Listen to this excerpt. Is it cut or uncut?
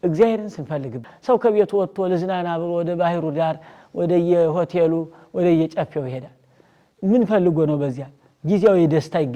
cut